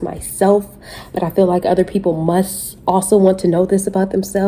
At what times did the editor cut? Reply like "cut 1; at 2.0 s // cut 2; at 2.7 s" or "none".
none